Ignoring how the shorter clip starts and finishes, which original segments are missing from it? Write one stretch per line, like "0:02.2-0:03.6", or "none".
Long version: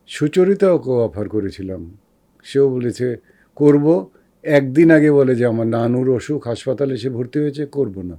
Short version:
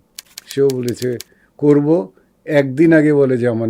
none